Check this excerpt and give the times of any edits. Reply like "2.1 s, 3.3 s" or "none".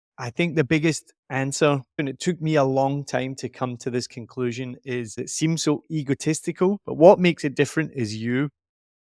2.1 s, 5.2 s

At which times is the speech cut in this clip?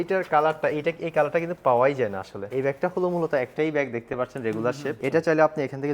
2.3 s, 5.0 s

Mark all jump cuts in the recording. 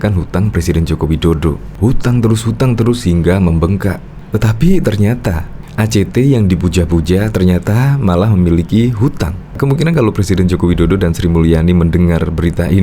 9.6 s

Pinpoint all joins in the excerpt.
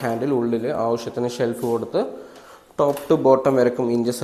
none

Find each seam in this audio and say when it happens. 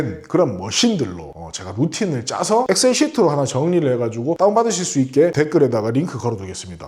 none

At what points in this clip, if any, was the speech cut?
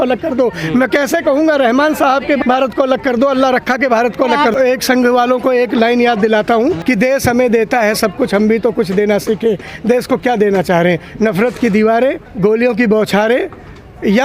2.4 s, 4.5 s, 6.8 s, 12.3 s

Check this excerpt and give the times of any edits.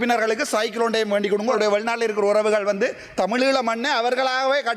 1.5 s

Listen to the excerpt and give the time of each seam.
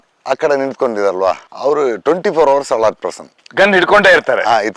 1.5 s

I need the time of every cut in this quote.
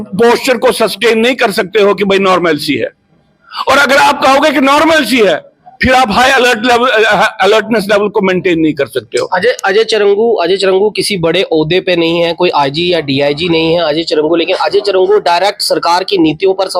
none

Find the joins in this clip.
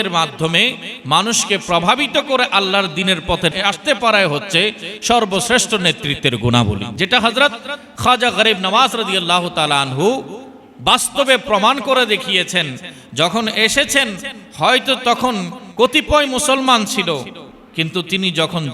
3.5 s, 6.9 s, 15.6 s

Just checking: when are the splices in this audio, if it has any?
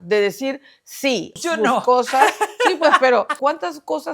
1.3 s, 3.3 s

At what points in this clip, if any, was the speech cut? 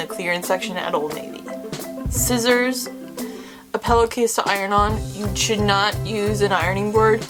none

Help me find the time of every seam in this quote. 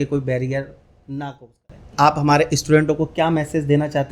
1.9 s

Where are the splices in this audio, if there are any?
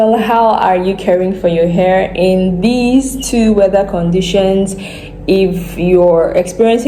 none

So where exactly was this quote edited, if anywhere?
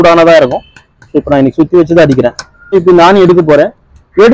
2.5 s

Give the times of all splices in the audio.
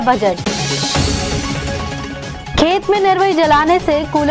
none

